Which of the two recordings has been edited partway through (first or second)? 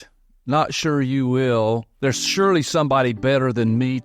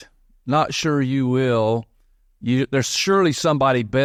first